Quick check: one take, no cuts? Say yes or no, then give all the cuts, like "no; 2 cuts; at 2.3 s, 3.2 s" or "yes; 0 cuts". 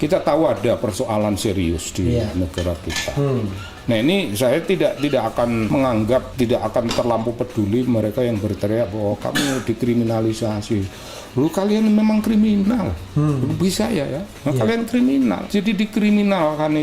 no; 2 cuts; at 6.1 s, 15.4 s